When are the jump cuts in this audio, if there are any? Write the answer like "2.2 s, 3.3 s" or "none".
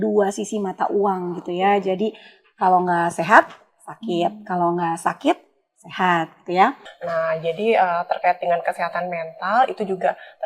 6.9 s